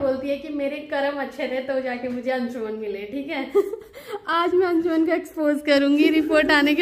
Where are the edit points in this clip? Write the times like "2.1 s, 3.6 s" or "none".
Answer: none